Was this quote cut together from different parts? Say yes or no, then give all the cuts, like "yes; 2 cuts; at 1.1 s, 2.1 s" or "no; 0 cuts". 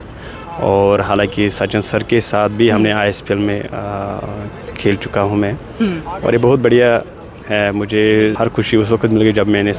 yes; 1 cut; at 8.3 s